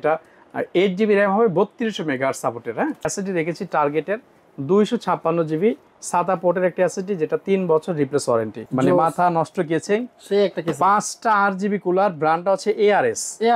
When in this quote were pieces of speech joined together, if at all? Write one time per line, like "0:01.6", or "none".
0:03.1
0:08.6